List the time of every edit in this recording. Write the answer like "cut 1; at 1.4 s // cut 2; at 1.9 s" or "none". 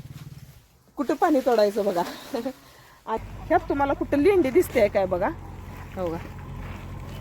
cut 1; at 3.2 s